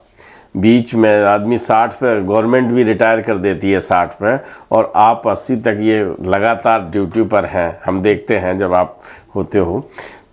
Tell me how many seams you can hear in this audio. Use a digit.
0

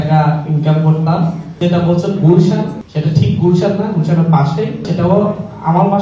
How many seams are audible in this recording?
2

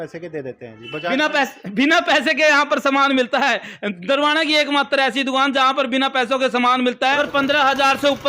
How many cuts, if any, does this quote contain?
1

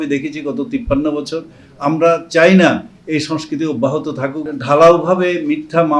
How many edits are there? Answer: 1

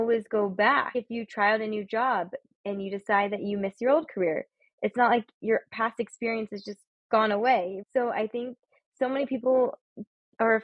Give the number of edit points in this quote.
2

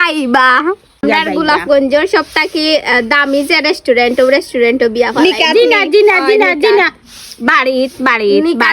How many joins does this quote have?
1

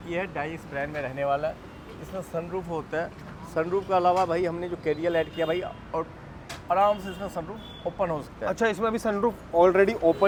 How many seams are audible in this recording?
0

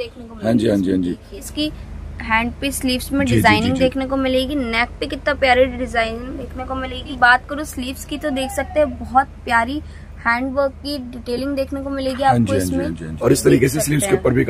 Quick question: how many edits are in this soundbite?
3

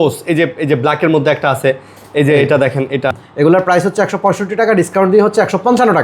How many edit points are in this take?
1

